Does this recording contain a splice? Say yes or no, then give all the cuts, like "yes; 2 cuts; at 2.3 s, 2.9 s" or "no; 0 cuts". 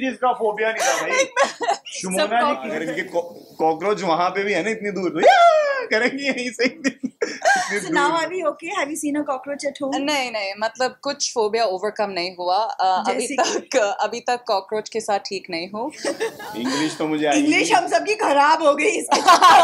yes; 2 cuts; at 2.8 s, 16.3 s